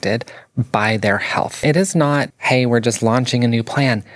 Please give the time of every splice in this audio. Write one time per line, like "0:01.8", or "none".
0:01.6
0:02.3

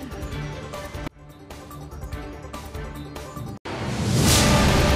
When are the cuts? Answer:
0:03.6

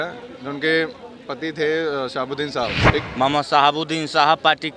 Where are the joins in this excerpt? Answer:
0:03.0

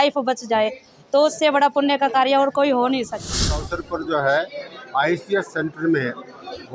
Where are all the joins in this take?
0:03.5

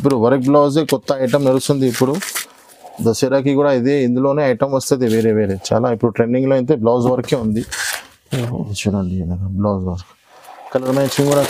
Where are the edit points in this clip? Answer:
none

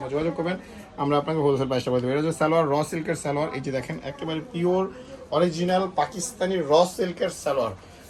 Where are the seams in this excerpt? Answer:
none

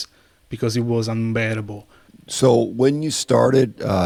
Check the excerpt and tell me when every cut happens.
none

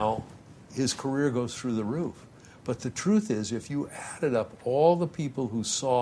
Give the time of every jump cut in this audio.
none

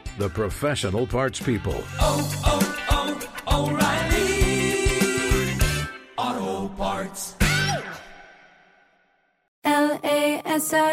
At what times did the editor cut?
0:09.4

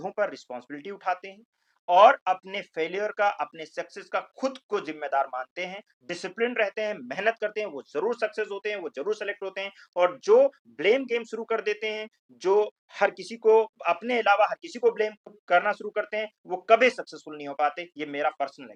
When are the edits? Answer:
none

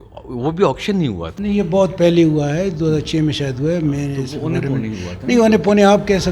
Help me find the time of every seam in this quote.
0:01.3

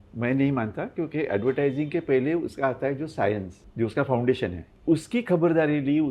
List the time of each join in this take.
0:03.6
0:04.7

